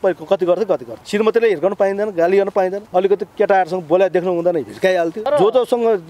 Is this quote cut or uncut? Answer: cut